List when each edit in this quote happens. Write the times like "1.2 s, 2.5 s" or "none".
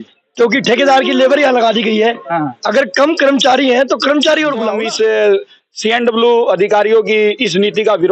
4.8 s